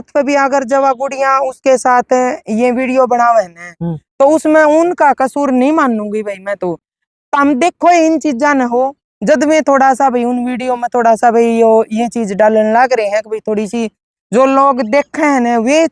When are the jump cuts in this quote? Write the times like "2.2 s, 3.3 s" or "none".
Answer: none